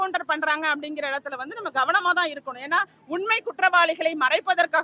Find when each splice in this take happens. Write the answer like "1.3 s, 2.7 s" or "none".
none